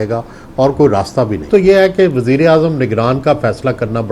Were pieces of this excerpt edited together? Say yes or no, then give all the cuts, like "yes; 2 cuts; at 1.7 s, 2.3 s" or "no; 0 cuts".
yes; 1 cut; at 1.5 s